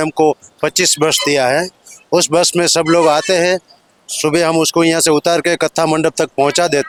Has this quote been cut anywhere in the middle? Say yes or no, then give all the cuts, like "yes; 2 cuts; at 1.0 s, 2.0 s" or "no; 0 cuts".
no; 0 cuts